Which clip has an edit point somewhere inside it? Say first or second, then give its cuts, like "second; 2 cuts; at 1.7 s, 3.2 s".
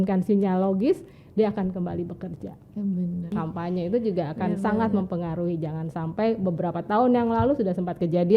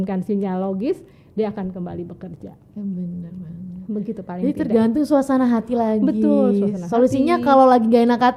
first; 1 cut; at 3.3 s